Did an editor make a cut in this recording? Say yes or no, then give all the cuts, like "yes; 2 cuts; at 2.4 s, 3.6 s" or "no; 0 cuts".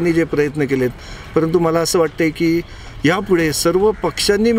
no; 0 cuts